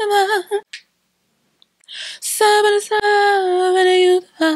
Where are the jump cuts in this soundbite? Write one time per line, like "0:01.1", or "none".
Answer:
none